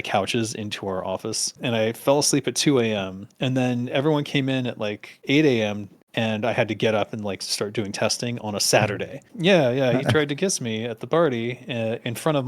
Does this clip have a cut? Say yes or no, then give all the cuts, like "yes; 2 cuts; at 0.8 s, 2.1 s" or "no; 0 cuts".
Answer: yes; 2 cuts; at 1.6 s, 9.2 s